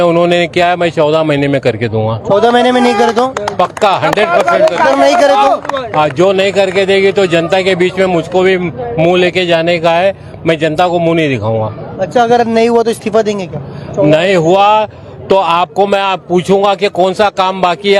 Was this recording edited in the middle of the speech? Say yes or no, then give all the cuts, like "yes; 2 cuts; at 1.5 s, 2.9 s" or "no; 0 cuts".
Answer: no; 0 cuts